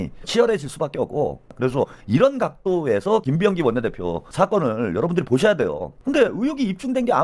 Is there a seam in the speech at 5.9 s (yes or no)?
yes